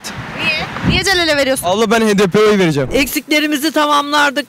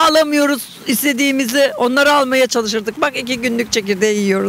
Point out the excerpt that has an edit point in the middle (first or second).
first